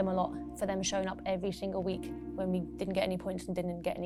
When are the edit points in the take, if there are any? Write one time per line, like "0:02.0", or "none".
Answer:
none